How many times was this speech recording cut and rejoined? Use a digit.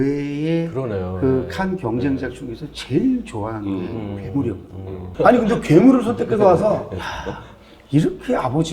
1